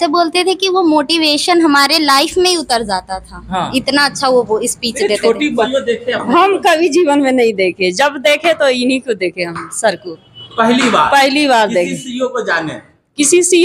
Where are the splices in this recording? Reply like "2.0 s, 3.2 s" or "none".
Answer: 5.7 s